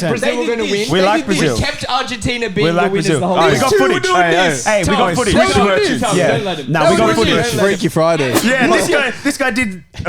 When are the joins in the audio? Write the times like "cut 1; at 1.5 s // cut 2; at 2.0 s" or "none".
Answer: cut 1; at 8.4 s